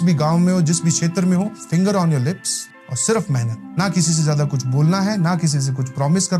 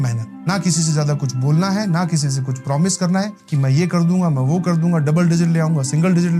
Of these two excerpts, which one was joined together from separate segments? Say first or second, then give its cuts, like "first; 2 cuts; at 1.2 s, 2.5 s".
first; 1 cut; at 1.6 s